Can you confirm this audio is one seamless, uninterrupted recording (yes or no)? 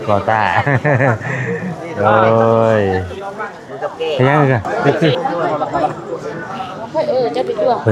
no